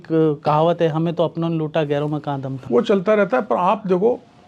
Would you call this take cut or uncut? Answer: uncut